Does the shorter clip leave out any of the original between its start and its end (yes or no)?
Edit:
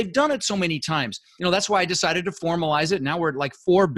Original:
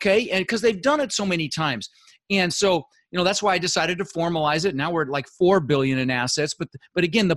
yes